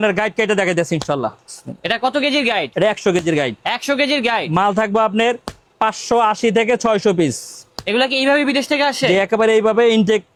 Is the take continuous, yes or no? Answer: yes